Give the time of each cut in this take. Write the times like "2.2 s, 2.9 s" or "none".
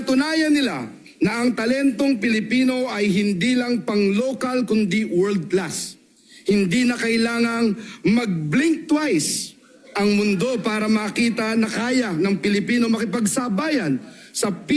3.1 s